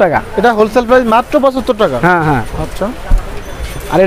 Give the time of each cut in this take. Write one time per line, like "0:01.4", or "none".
none